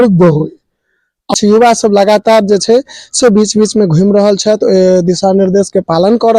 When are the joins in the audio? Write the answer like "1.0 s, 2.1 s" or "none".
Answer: 1.3 s